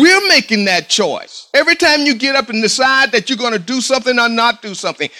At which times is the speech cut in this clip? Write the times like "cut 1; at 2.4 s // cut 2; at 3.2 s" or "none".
cut 1; at 1.3 s